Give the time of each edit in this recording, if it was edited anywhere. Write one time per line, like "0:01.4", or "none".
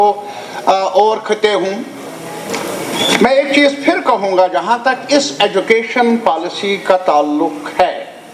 none